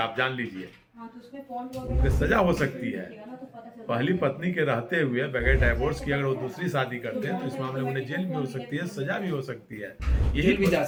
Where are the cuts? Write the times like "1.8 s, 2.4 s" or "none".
none

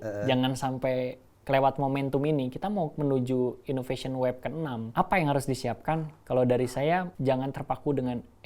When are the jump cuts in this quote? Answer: 4.9 s, 7.1 s

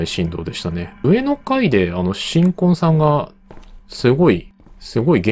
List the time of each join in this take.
1.0 s

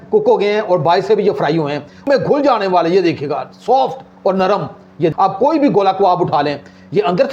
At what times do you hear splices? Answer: 2.1 s, 5.1 s

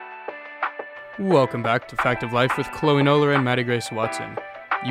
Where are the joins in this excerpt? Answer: 1.2 s

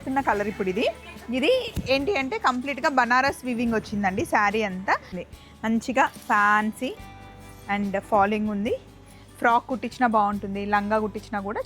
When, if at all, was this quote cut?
5.2 s

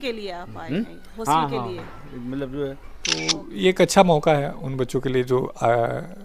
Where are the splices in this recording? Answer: 3.4 s

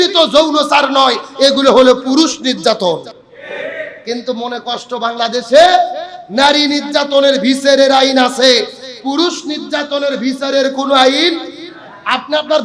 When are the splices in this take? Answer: none

